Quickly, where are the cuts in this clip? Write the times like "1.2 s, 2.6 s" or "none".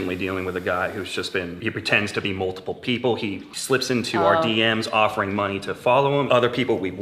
1.6 s, 3.5 s, 6.3 s